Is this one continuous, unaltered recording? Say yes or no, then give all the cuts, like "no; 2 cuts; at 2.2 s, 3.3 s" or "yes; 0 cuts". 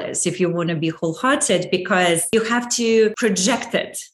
no; 2 cuts; at 2.3 s, 3.2 s